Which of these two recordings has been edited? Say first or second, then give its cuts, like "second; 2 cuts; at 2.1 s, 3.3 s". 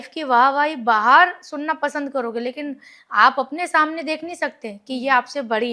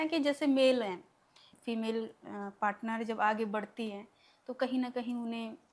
second; 1 cut; at 1.5 s